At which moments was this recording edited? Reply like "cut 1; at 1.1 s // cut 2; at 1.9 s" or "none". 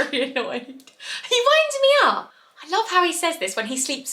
cut 1; at 2.3 s